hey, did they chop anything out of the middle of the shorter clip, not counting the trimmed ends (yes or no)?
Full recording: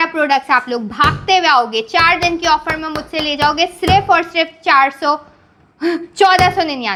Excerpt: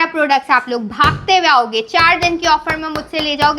no